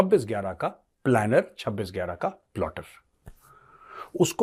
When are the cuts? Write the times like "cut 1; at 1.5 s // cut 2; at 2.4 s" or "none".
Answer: none